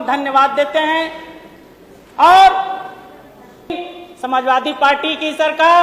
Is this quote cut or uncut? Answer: cut